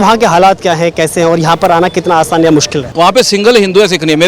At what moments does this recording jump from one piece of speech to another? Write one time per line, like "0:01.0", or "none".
0:02.8